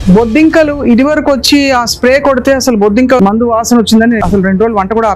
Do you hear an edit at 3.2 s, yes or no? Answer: yes